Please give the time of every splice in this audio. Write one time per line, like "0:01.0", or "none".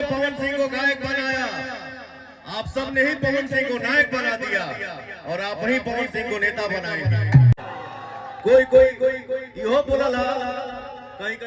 0:07.6

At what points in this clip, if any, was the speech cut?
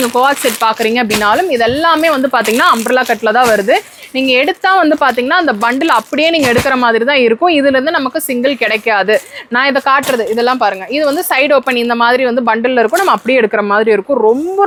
none

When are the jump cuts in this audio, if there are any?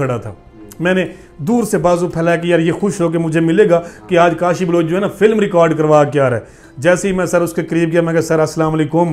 none

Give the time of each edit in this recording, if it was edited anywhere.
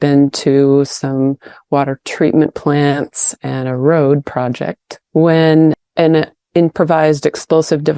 none

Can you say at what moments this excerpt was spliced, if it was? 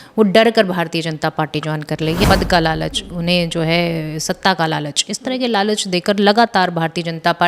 0:02.2

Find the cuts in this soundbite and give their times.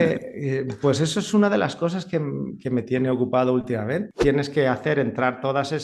0:04.1

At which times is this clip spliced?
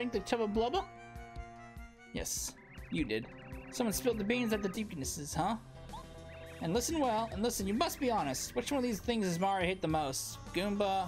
0:04.7

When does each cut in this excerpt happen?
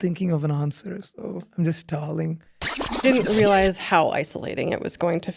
0:03.0

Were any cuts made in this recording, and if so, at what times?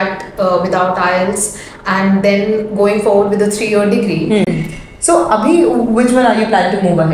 0:04.5

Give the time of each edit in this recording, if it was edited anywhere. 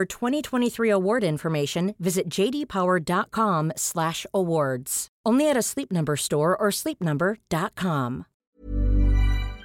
0:08.3

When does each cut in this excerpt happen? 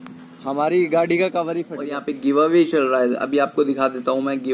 0:02.0

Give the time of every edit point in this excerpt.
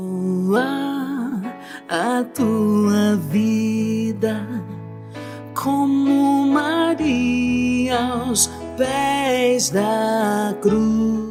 none

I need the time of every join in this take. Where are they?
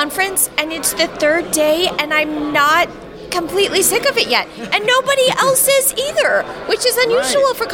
none

